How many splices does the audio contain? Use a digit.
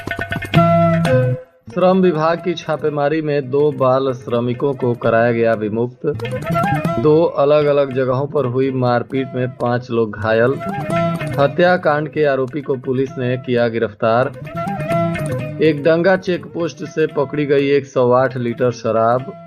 1